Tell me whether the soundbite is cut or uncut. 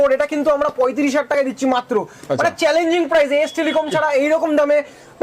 uncut